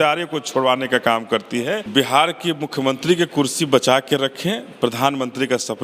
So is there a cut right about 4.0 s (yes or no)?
no